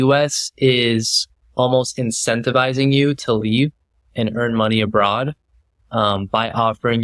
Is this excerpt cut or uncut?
uncut